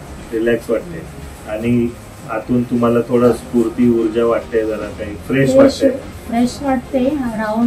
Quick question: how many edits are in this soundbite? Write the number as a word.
zero